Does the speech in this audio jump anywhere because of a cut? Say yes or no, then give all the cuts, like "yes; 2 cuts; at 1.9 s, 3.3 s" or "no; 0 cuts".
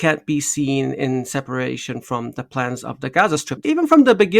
yes; 1 cut; at 3.5 s